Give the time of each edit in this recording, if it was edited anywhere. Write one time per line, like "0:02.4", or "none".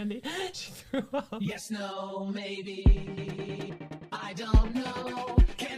0:01.4